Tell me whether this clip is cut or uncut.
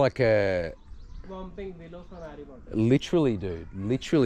uncut